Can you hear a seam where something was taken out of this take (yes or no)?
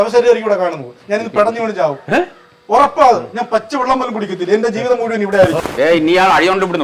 yes